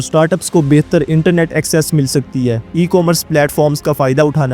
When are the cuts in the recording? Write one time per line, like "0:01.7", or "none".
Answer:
0:02.6

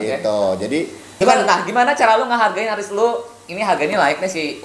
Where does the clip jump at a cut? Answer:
0:01.0

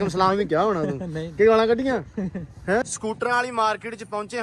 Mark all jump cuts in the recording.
0:02.8

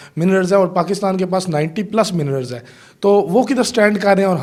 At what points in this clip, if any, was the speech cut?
none

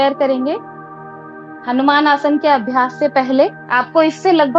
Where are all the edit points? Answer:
0:03.7

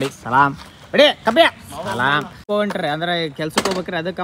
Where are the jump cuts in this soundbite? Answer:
0:02.5

